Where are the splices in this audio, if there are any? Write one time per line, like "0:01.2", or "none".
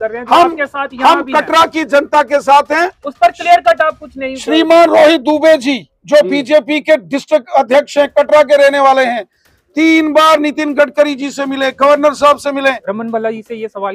0:12.8